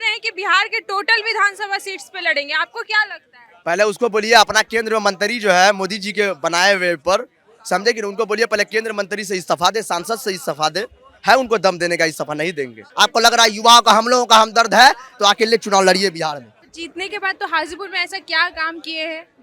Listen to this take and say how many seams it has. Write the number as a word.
two